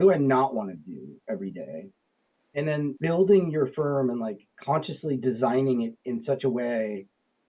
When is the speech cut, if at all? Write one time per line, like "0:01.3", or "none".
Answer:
0:03.0